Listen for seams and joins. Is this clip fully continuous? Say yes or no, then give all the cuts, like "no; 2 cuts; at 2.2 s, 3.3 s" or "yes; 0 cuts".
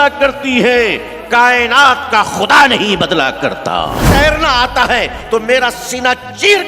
no; 1 cut; at 4.0 s